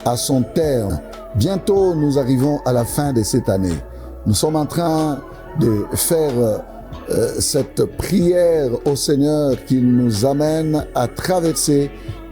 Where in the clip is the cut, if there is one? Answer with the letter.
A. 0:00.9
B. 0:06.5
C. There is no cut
A